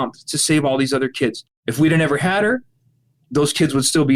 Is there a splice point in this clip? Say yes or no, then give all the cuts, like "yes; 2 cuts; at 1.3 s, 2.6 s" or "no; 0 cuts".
yes; 1 cut; at 1.4 s